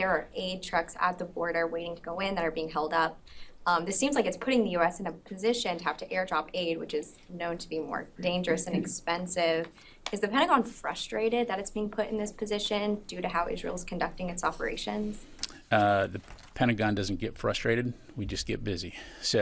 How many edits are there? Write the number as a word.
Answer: four